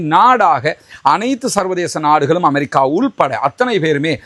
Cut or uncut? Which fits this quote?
uncut